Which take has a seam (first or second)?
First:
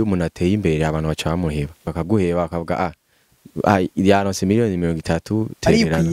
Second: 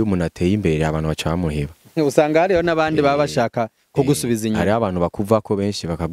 first